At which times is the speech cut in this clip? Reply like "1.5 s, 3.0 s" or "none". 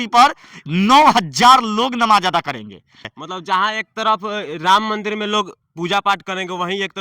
3.1 s